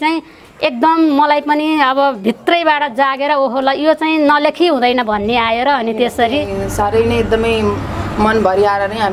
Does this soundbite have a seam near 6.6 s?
yes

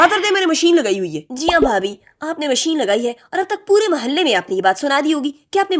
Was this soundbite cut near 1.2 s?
yes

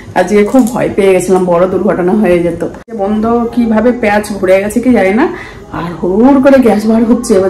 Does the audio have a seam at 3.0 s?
yes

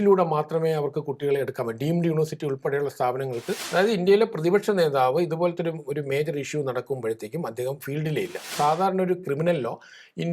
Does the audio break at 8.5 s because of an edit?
yes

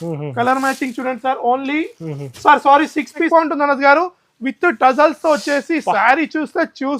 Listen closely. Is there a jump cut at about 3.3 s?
yes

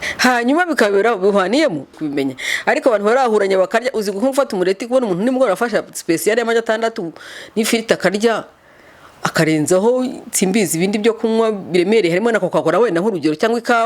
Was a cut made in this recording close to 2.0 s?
yes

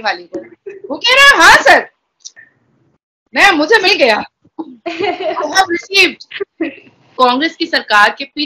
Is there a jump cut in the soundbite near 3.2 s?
no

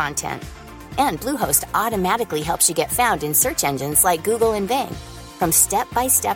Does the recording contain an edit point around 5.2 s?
no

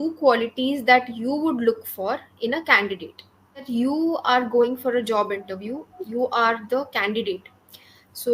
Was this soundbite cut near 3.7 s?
yes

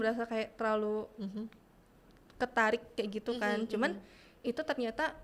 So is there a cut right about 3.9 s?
no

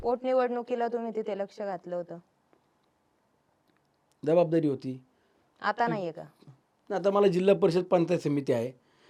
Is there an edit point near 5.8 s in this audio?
no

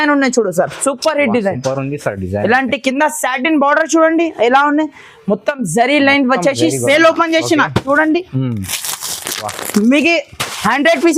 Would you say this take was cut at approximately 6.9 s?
yes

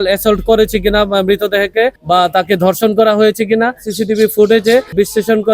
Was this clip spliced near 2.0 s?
yes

